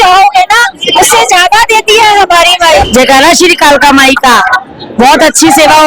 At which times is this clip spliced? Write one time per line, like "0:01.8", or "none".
0:02.9